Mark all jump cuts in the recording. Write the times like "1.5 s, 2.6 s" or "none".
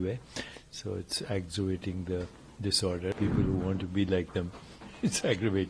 3.1 s